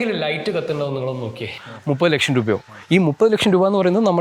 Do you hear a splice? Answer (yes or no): yes